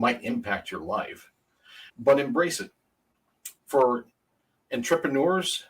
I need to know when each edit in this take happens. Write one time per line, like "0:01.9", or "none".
0:03.6

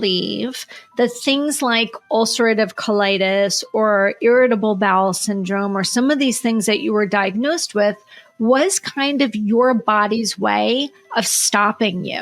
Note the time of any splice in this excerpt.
none

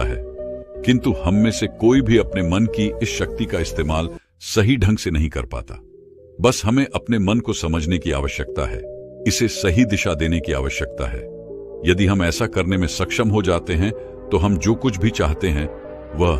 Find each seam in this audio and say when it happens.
none

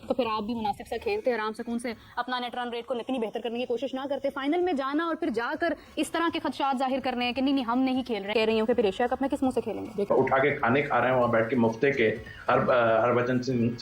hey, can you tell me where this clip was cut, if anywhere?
none

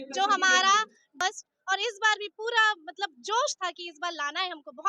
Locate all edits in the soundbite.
0:01.2

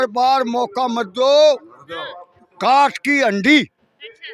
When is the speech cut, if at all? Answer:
none

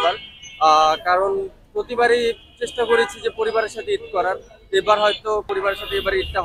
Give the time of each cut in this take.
0:05.5

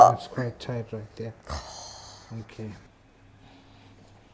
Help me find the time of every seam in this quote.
0:02.9

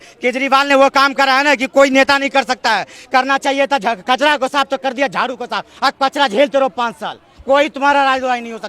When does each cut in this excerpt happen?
none

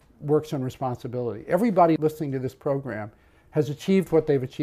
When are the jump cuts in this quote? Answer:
0:02.0

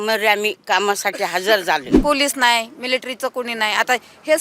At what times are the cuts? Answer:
0:01.9

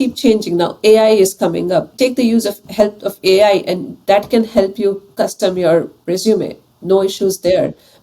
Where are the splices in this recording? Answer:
0:01.9

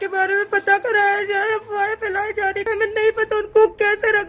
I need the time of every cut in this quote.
0:02.6

